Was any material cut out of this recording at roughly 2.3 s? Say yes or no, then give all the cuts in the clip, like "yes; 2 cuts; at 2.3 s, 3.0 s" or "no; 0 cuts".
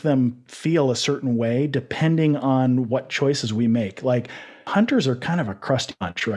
no; 0 cuts